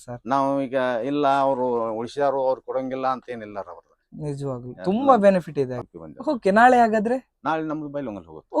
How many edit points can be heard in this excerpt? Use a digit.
1